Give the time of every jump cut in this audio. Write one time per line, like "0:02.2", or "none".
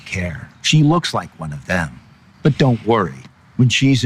0:02.0

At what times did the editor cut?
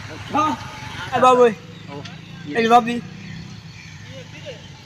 0:01.2

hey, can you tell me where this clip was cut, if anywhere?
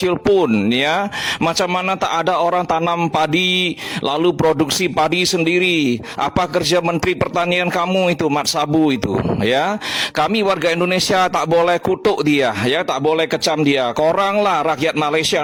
none

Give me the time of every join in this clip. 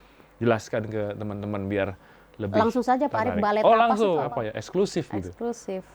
0:04.2

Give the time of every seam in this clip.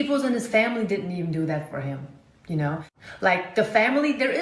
0:03.3

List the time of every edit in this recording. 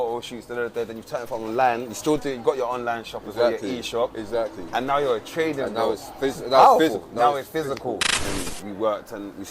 0:08.1

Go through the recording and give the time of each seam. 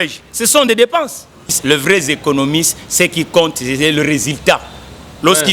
0:01.6

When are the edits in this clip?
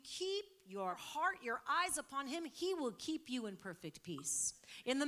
0:01.0

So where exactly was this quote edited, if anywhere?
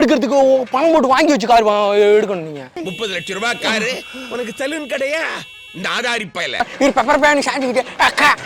0:06.7

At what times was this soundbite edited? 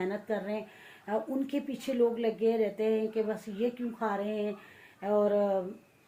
none

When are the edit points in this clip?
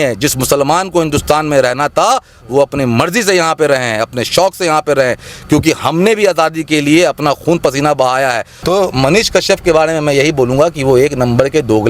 0:08.5

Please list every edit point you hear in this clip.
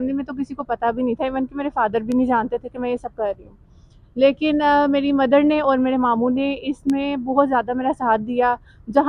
none

